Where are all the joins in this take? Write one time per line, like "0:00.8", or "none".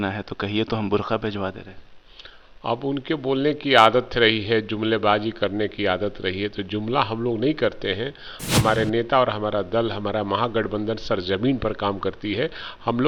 none